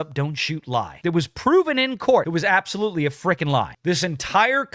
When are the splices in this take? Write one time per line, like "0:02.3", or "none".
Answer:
0:00.9
0:02.3
0:03.7